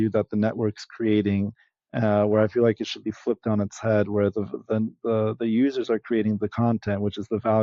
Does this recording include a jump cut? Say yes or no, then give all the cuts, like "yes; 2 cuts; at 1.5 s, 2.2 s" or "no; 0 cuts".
no; 0 cuts